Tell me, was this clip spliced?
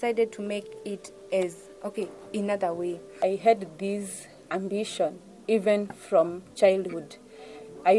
yes; 1 cut; at 3.1 s

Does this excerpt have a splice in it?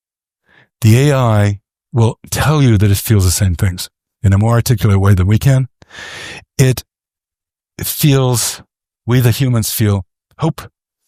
no; 0 cuts

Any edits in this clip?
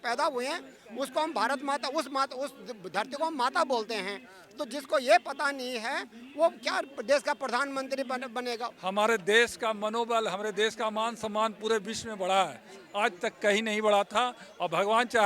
yes; 1 cut; at 8.7 s

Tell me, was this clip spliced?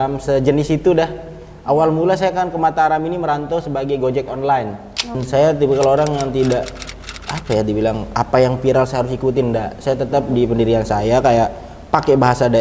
yes; 1 cut; at 5.2 s

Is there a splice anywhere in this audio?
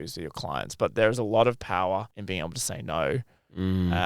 yes; 1 cut; at 2.1 s

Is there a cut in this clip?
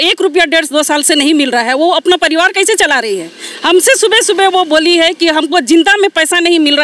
no; 0 cuts

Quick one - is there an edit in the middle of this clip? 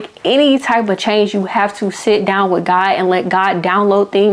no; 0 cuts

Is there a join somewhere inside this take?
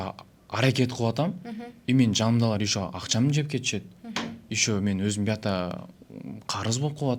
no; 0 cuts

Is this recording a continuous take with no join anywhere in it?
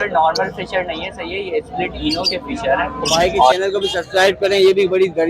no; 1 cut; at 3.5 s

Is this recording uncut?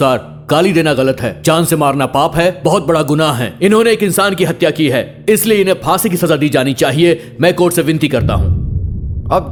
yes; 0 cuts

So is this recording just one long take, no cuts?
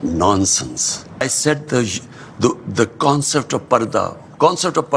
no; 1 cut; at 1.2 s

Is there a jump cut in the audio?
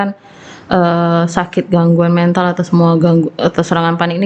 no; 0 cuts

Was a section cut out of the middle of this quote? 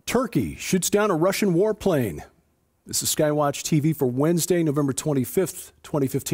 no; 0 cuts

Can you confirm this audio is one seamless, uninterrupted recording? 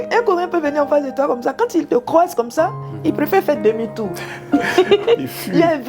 yes; 0 cuts

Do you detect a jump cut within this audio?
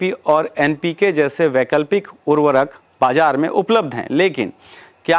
no; 0 cuts

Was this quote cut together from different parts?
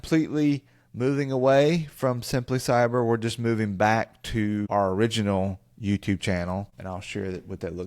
yes; 2 cuts; at 4.7 s, 6.8 s

